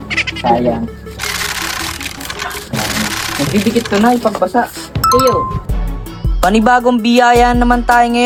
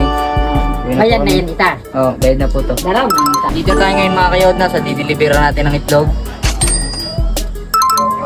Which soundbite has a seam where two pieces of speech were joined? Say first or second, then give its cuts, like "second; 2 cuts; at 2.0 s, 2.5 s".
second; 1 cut; at 3.5 s